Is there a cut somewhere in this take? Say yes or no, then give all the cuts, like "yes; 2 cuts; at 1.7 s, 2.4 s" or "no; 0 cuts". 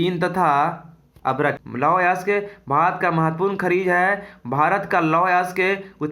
yes; 1 cut; at 1.6 s